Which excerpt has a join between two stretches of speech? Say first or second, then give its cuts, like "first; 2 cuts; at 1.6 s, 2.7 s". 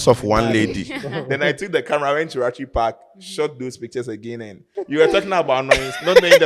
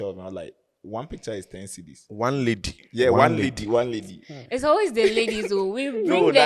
first; 1 cut; at 4.6 s